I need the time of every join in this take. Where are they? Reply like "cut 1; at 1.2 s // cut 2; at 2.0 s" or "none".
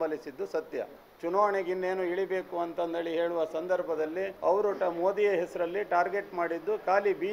cut 1; at 1.0 s // cut 2; at 4.3 s